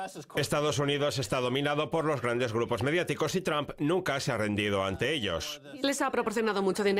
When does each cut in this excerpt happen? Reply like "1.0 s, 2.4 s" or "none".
1.0 s